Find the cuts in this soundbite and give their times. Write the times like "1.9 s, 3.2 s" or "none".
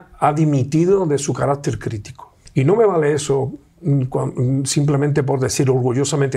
2.4 s